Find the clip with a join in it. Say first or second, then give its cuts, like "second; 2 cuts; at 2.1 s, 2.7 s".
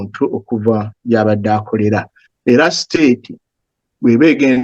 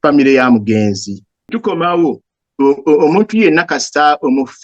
second; 1 cut; at 1.5 s